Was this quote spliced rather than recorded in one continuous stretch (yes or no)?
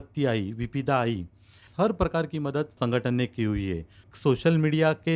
yes